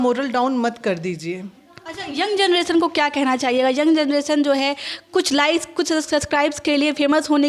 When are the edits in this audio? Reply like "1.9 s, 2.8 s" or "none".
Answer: none